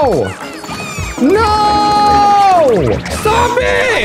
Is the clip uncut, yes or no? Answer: no